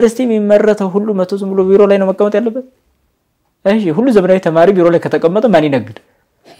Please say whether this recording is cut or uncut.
uncut